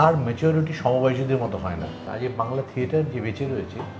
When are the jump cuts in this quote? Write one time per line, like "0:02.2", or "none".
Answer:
0:02.0